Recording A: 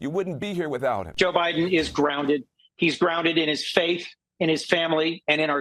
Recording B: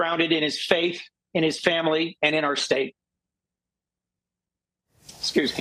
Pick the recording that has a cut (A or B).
A